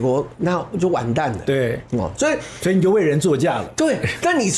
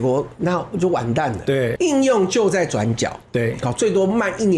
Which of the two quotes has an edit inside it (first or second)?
second